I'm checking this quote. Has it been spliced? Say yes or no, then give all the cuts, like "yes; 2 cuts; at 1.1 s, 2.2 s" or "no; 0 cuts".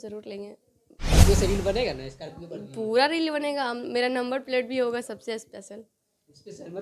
yes; 1 cut; at 1.1 s